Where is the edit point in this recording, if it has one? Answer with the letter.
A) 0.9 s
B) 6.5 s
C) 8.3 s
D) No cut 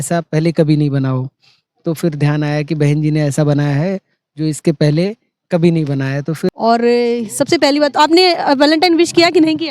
B